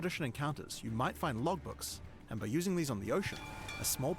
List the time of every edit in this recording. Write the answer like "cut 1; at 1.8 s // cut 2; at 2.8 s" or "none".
cut 1; at 1.3 s

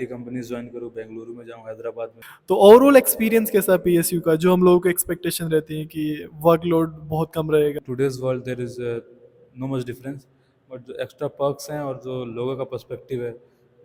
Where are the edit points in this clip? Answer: cut 1; at 2.3 s // cut 2; at 7.8 s

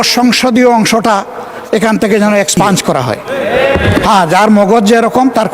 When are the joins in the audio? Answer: cut 1; at 4.0 s

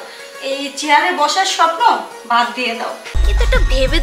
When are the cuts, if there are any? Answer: cut 1; at 3.0 s

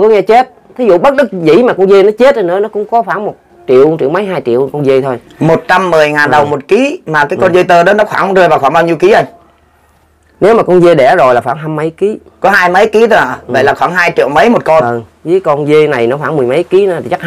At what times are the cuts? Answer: none

